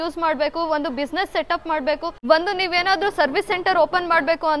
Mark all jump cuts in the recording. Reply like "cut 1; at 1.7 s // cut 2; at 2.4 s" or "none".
cut 1; at 2.1 s